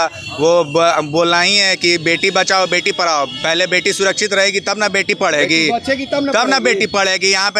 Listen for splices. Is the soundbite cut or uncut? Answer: uncut